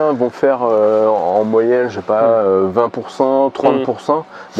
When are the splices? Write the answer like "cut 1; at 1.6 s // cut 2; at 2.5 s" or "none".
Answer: none